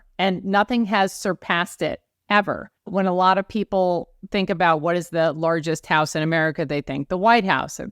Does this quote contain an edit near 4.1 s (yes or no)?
no